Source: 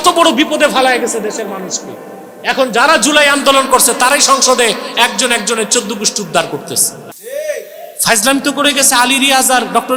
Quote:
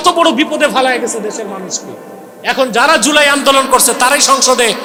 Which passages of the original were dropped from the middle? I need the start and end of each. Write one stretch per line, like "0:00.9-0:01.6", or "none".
none